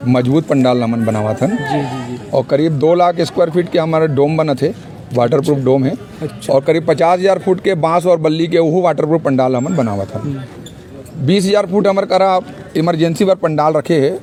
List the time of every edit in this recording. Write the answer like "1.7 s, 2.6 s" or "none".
none